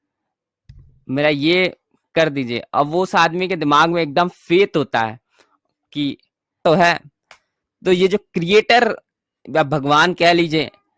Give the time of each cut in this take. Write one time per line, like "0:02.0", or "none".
0:06.6